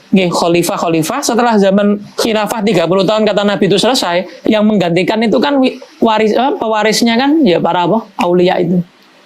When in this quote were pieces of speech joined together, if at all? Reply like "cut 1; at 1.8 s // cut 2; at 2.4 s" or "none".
cut 1; at 4.3 s